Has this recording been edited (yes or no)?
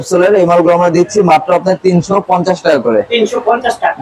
no